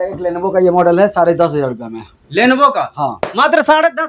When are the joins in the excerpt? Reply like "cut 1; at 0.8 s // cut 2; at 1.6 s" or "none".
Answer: none